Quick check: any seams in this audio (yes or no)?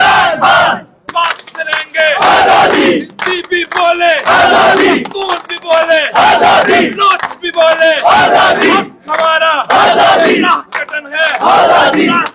yes